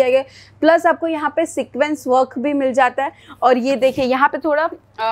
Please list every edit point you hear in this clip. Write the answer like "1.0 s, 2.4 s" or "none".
none